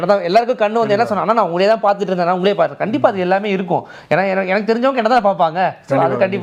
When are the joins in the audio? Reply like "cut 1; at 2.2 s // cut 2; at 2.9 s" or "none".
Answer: none